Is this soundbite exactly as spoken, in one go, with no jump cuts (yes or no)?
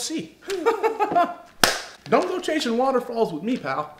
no